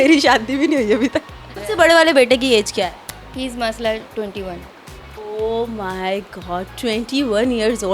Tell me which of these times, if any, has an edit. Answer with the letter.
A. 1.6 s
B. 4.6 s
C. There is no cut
A